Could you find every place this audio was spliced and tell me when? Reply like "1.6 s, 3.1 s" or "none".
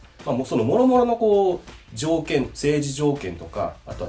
none

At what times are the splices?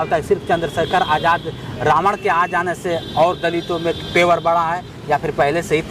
none

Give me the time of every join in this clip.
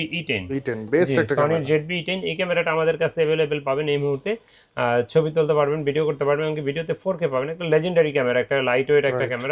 none

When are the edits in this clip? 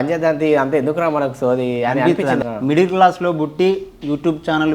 2.4 s

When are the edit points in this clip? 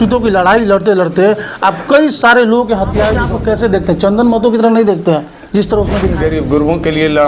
3.2 s, 6.1 s

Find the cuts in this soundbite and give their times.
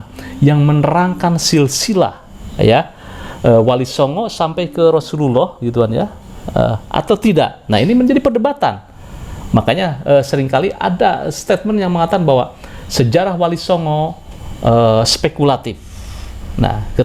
none

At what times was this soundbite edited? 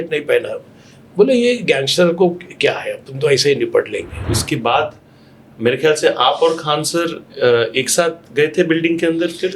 4.3 s

